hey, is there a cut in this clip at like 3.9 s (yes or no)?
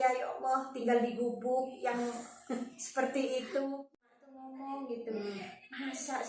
yes